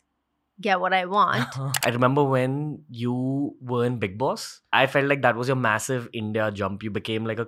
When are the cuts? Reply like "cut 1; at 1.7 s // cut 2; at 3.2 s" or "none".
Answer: cut 1; at 1.6 s // cut 2; at 4.7 s